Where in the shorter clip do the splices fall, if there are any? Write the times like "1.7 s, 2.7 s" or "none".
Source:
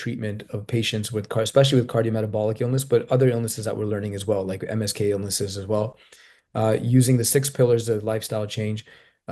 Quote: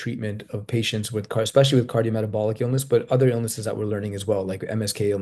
none